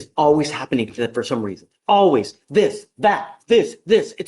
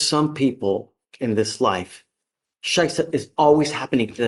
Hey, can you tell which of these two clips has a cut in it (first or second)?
first